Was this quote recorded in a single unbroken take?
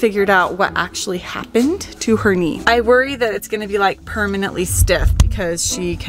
no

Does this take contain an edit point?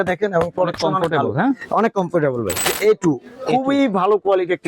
yes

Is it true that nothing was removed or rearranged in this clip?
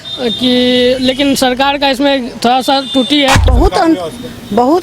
no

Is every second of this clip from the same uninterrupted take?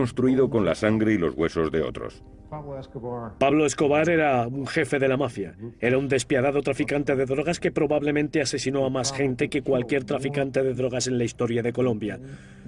no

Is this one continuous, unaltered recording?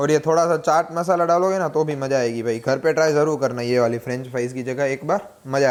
yes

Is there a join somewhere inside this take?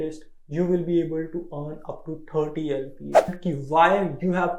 yes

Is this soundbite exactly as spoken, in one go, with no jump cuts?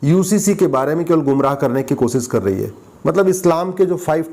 no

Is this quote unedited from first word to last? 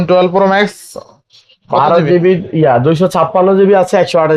yes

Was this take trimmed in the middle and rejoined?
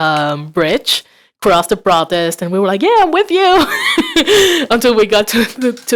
no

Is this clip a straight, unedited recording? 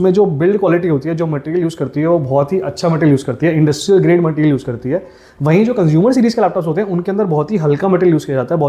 yes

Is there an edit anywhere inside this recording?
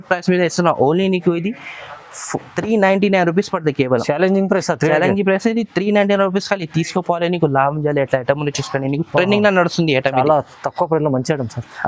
no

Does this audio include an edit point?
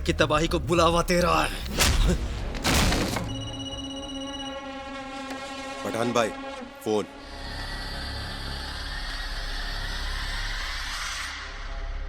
no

